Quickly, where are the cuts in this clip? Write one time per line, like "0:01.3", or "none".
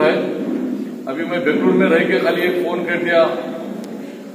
none